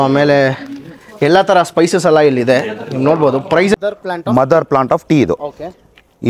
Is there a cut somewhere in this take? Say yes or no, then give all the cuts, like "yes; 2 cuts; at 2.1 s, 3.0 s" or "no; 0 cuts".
yes; 1 cut; at 3.7 s